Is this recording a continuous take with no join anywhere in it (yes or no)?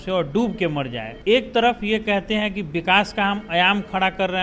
no